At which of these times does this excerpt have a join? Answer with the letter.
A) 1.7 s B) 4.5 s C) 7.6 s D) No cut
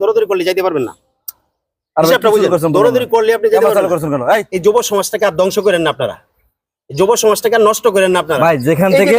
B